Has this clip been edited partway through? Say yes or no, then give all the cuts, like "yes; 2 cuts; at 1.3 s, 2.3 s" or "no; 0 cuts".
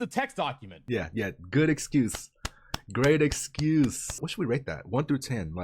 yes; 2 cuts; at 0.8 s, 4.2 s